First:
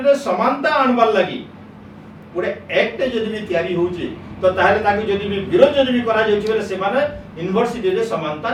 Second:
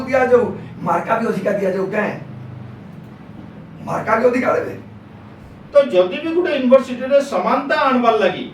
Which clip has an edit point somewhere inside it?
second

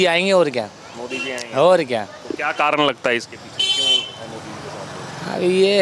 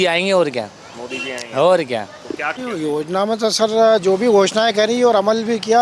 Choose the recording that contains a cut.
second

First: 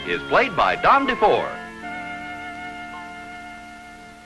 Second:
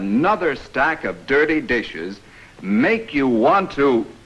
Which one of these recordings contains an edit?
second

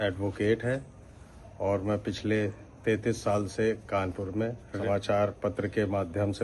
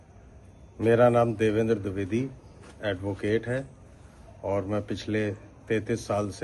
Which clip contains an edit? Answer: first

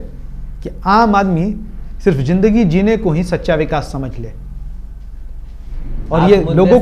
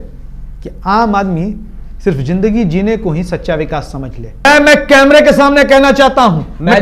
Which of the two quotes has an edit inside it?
second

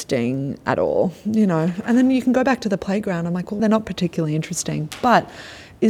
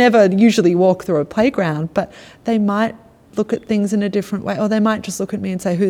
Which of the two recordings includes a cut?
first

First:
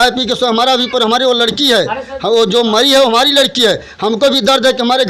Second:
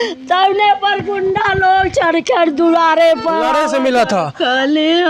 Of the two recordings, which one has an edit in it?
second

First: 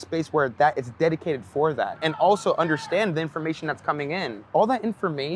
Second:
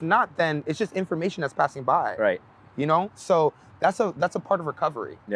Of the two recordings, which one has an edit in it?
first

